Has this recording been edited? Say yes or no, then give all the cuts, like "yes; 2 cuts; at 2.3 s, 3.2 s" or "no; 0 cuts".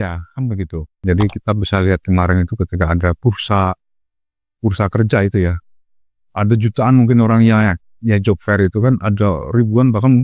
yes; 1 cut; at 0.9 s